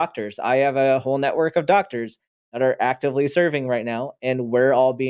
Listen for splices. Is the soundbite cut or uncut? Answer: uncut